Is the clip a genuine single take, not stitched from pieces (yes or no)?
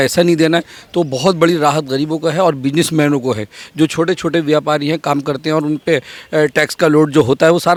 yes